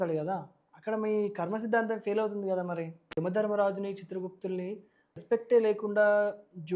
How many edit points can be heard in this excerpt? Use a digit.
2